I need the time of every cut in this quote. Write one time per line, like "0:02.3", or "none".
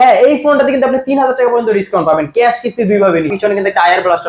0:03.3